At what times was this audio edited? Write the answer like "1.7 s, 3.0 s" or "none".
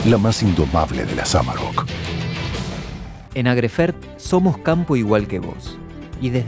3.1 s